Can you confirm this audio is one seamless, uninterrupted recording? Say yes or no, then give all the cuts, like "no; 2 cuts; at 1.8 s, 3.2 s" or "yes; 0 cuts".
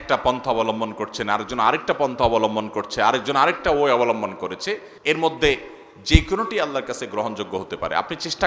no; 1 cut; at 4.9 s